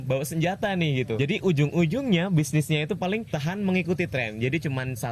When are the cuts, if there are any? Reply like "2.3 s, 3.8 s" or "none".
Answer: 1.2 s, 3.3 s